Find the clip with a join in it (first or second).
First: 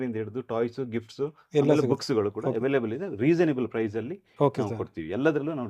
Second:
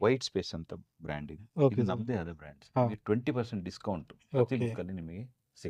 second